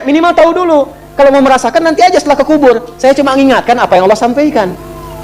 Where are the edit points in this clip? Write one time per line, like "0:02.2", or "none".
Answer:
none